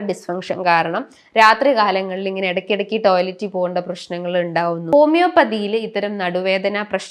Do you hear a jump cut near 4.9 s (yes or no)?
yes